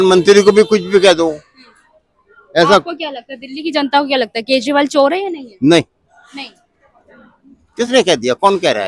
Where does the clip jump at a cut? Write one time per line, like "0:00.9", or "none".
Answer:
none